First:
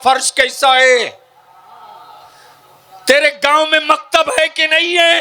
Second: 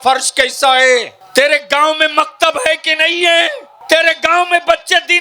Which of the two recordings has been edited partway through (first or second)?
second